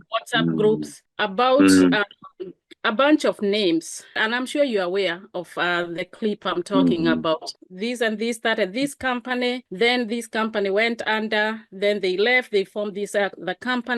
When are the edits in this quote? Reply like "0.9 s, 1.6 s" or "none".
4.2 s, 7.5 s